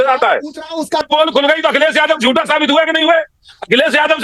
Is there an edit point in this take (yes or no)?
yes